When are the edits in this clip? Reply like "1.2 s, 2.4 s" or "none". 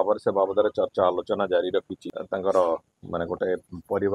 2.0 s